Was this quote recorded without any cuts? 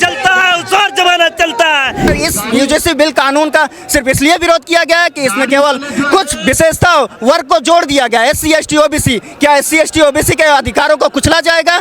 no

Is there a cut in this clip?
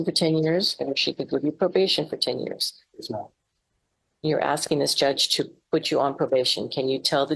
no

